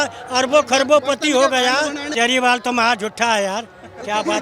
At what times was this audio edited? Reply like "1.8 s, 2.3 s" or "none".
2.1 s

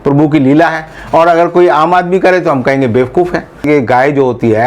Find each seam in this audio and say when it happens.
3.6 s

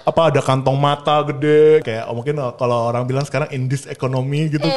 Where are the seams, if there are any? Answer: 1.9 s

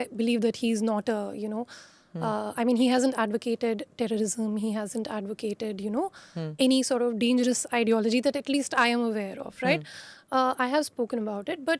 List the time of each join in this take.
none

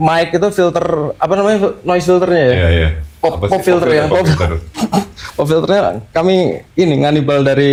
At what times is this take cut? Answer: none

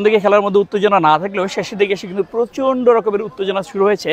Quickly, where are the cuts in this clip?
none

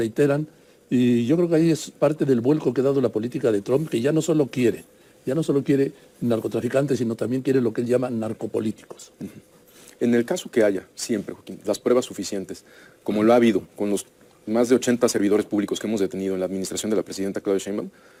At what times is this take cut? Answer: none

